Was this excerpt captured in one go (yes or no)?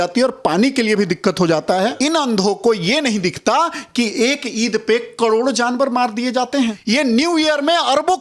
no